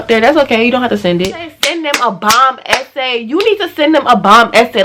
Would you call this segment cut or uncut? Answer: cut